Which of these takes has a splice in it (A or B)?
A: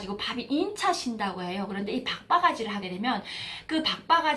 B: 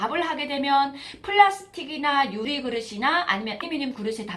B